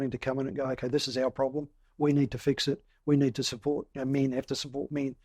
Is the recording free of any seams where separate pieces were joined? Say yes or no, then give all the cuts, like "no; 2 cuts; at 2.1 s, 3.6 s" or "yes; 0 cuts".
yes; 0 cuts